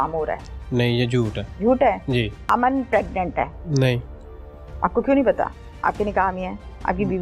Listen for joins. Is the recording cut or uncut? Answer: cut